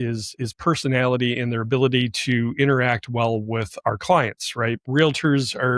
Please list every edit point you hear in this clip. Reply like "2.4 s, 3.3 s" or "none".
4.9 s

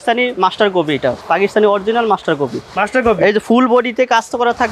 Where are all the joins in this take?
none

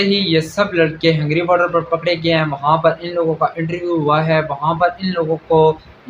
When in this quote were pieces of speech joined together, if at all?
none

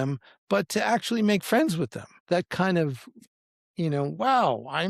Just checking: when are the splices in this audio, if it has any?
2.2 s, 3.2 s

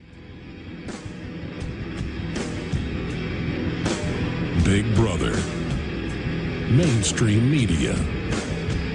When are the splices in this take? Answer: none

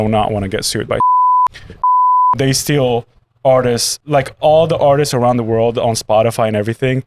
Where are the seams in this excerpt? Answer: 3.9 s

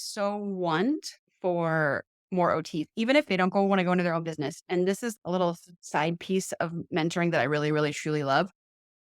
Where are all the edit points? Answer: 3.3 s

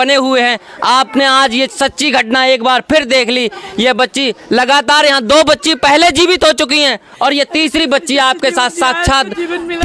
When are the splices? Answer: none

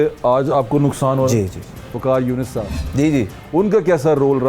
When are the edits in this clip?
1.8 s

